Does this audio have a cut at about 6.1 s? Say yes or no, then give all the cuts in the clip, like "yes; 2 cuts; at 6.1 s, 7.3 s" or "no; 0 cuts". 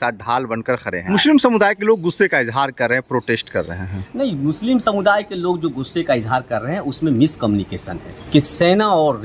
no; 2 cuts; at 1.0 s, 8.1 s